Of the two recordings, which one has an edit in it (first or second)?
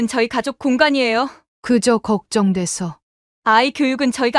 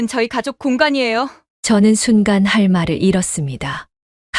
first